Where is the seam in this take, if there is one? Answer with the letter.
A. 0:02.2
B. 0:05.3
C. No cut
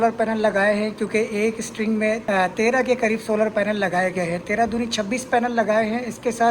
A